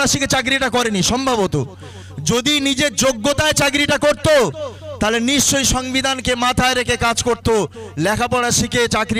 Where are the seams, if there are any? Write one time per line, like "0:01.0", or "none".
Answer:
none